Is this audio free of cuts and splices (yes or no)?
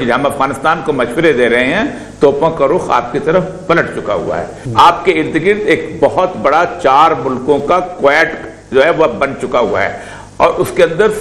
no